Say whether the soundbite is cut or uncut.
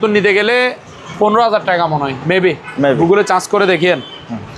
uncut